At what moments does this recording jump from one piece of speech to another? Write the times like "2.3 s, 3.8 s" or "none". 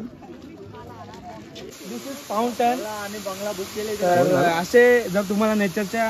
1.7 s